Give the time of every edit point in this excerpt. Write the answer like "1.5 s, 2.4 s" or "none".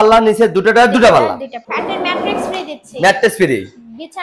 1.6 s